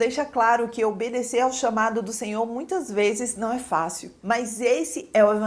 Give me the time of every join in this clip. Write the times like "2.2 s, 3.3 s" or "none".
4.2 s